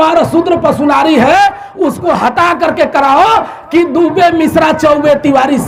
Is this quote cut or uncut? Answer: uncut